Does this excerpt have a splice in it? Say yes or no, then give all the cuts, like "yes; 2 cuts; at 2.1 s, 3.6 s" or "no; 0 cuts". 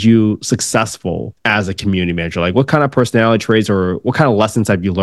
yes; 1 cut; at 1.3 s